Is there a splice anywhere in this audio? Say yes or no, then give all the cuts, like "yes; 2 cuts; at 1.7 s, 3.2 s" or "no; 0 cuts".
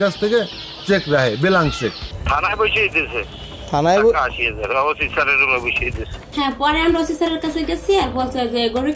yes; 2 cuts; at 2.1 s, 6.2 s